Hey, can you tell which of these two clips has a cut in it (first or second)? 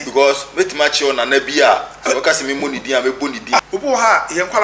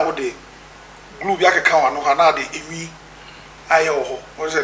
first